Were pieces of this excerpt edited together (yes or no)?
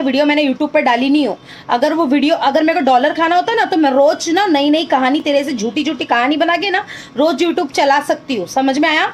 no